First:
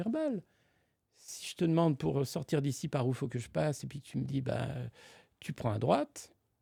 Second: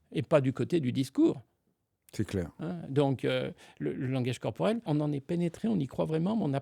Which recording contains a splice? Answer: second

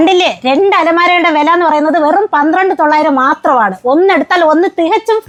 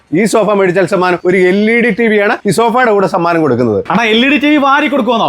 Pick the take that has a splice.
second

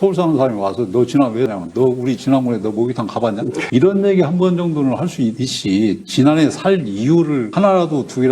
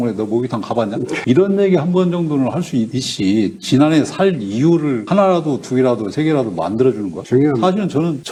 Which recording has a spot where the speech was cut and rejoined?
first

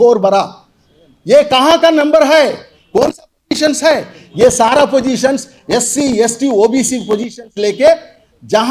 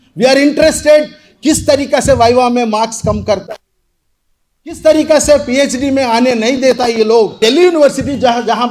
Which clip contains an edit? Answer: second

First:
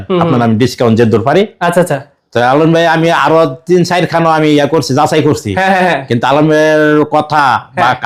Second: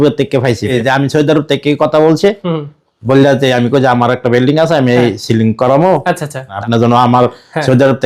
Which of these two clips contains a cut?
second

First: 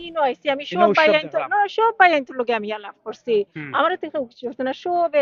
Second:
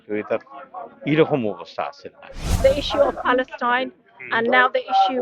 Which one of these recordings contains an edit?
second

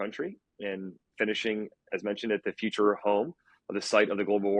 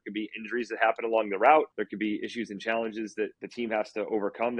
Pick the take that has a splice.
second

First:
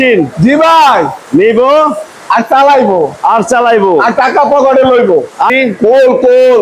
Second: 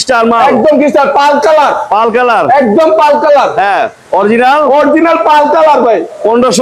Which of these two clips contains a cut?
first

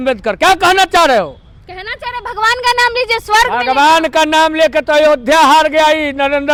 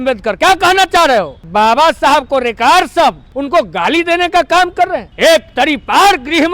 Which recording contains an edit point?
second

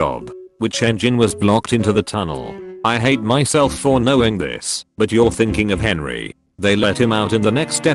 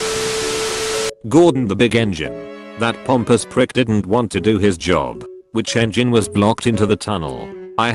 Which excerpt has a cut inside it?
second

